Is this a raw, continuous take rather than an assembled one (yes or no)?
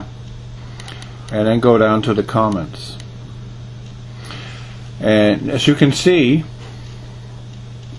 no